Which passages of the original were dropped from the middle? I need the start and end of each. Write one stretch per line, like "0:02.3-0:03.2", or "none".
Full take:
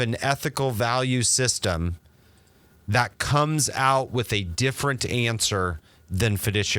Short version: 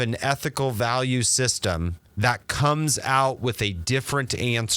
0:02.0-0:02.7

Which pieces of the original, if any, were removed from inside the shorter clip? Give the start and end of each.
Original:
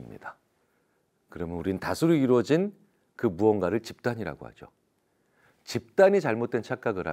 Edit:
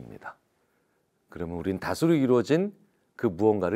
none

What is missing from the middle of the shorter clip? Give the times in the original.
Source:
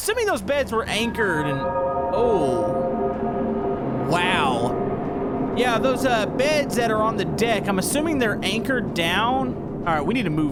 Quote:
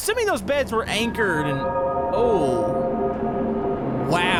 none

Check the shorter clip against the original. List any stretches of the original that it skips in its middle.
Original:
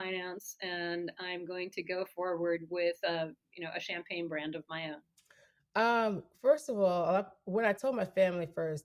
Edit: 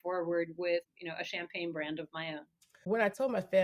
0:03.0-0:03.4
0:05.3-0:07.4

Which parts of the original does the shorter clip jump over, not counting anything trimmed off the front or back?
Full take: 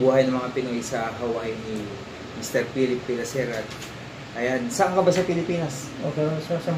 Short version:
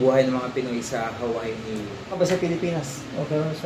0:02.2-0:05.0

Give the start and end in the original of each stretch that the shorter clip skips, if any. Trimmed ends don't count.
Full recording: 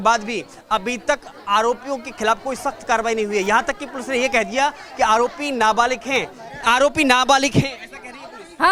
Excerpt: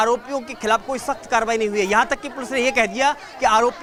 none

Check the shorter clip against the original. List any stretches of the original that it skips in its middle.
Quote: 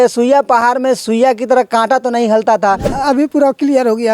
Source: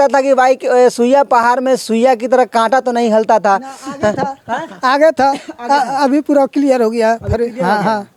0:03.8-0:05.9

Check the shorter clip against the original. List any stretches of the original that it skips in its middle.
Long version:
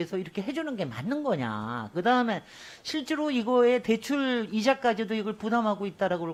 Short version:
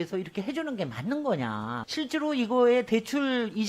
0:01.7-0:02.7

